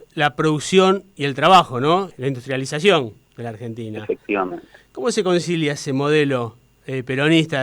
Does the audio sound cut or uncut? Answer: cut